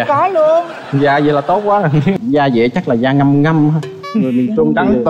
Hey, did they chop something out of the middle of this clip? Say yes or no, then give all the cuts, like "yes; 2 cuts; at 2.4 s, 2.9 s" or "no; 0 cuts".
yes; 1 cut; at 2.2 s